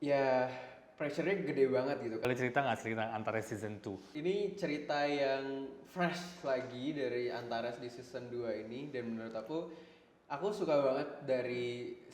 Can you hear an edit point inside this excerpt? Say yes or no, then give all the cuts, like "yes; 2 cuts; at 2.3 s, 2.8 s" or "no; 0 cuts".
yes; 2 cuts; at 2.2 s, 4.0 s